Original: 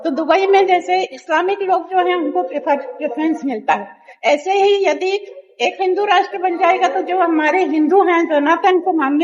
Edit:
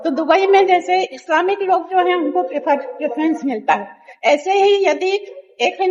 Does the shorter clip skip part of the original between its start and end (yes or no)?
no